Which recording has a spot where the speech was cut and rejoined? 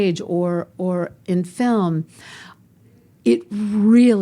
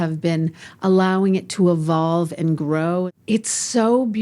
second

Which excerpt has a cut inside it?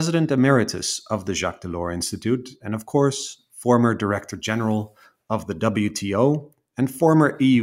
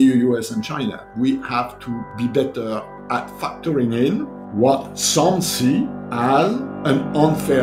second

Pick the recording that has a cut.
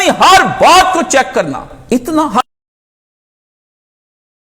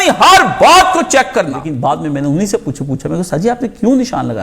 second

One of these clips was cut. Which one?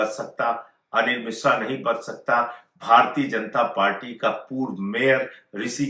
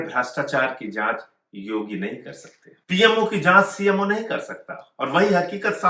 second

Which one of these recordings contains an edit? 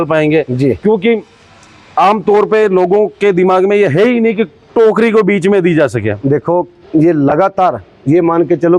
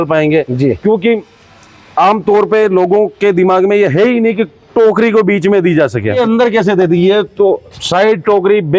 second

